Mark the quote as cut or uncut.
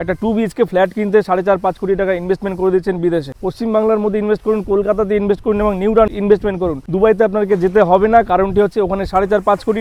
uncut